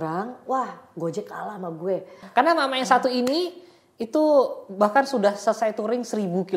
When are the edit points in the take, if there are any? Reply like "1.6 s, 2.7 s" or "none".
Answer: 2.2 s